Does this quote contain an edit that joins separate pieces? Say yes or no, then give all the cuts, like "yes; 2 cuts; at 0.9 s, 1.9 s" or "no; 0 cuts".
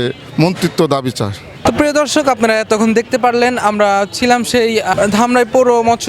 no; 0 cuts